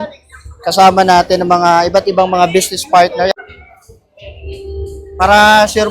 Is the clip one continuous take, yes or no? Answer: no